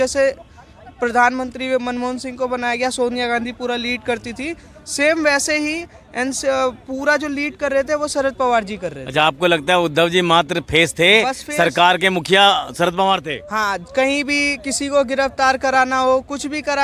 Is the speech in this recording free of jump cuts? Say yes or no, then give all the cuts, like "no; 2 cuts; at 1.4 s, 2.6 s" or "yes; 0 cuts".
yes; 0 cuts